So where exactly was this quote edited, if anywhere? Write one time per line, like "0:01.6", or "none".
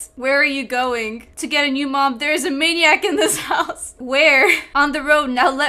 0:03.9